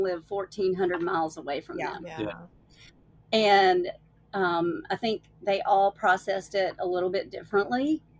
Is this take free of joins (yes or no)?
yes